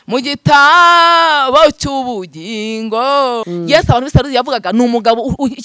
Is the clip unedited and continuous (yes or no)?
no